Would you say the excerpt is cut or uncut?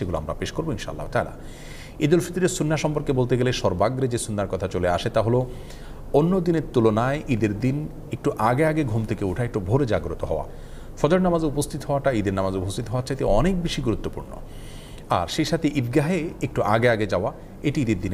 uncut